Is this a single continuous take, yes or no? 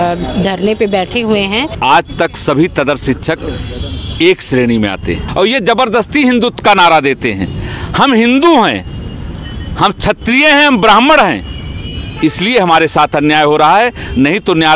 no